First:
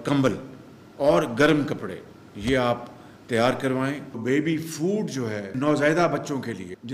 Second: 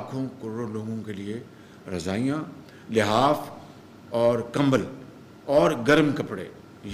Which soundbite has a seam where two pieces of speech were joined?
first; 1 cut; at 4.2 s

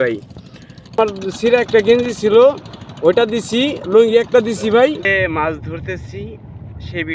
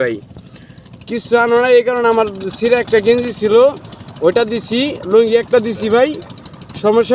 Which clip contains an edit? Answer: first; 2 cuts; at 1.0 s, 5.1 s

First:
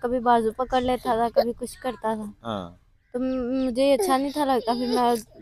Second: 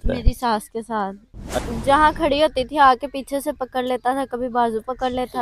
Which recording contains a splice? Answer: second; 1 cut; at 1.7 s

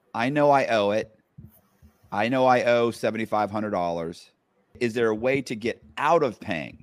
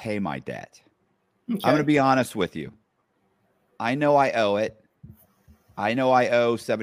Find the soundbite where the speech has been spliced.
first; 1 cut; at 4.8 s

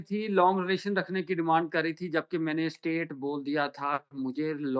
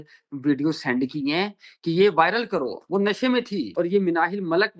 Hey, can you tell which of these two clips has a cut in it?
second; 1 cut; at 3.7 s

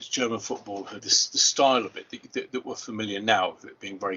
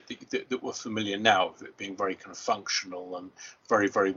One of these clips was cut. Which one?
first; 1 cut; at 1.1 s

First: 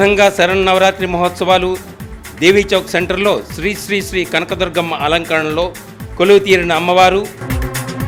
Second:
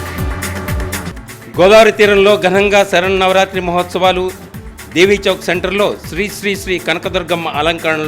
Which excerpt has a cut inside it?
second; 1 cut; at 1.1 s

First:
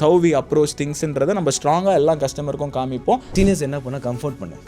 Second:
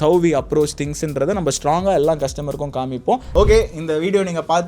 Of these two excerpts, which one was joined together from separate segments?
first; 1 cut; at 3.3 s

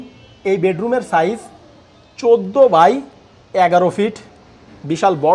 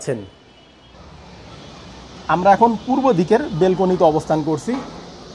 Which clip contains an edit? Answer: second; 1 cut; at 0.9 s

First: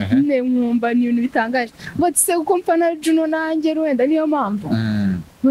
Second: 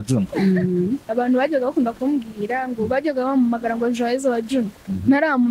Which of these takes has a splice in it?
second; 1 cut; at 1.1 s

